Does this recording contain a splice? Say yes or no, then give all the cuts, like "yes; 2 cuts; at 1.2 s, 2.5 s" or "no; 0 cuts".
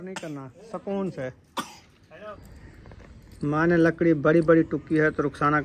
yes; 1 cut; at 2.4 s